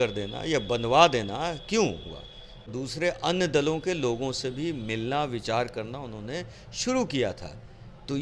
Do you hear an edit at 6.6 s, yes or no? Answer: no